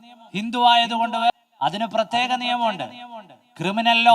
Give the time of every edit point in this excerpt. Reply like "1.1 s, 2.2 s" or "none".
1.3 s